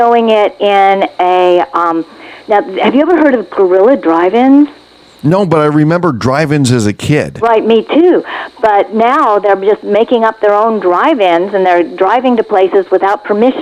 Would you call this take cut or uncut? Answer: uncut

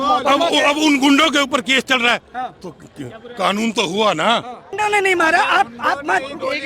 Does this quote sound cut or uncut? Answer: cut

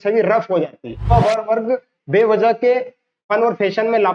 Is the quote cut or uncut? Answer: cut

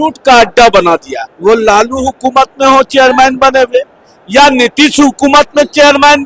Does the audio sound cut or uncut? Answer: cut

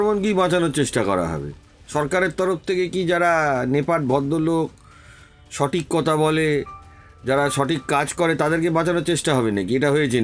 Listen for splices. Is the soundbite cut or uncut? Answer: uncut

